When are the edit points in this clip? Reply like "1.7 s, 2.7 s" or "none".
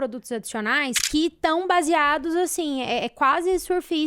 1.0 s